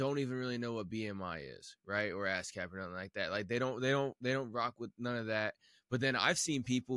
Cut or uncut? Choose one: uncut